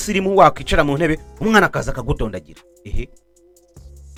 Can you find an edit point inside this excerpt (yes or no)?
no